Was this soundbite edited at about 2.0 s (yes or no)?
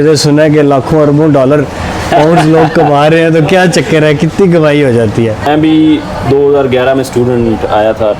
no